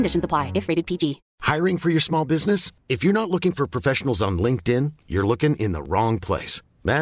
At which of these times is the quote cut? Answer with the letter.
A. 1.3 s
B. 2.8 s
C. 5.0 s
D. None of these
A